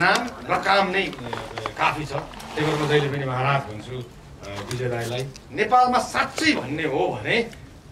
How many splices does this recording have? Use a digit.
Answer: 1